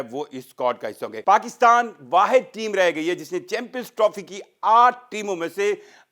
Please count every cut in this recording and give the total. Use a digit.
1